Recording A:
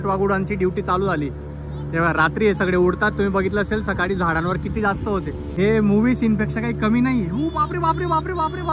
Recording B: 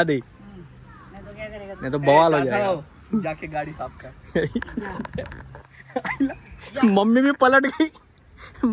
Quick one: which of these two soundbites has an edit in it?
A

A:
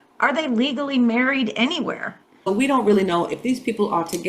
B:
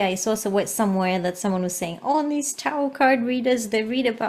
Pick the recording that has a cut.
A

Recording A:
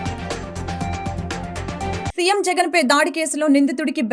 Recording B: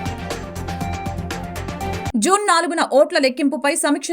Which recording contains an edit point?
A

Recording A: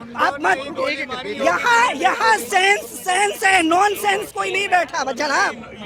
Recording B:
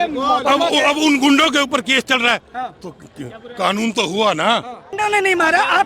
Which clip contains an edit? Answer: B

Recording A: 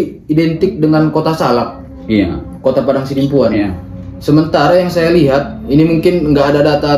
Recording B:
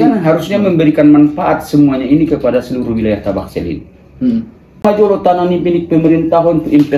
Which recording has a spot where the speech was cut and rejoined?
B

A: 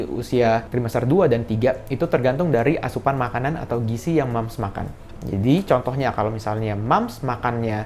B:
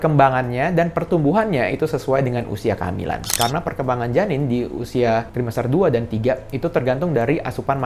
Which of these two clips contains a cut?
B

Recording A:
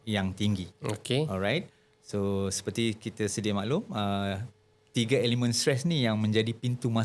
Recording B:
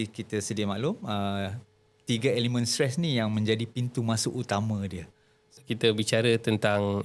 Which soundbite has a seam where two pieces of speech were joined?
B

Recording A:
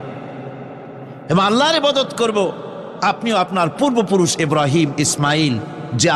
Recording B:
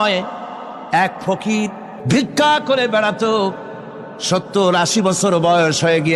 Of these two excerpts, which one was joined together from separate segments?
B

